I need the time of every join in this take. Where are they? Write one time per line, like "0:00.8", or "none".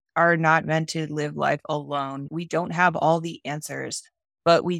0:02.3